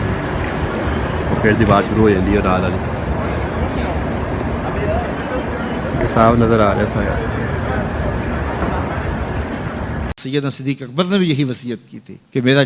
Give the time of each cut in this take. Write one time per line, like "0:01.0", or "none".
0:10.2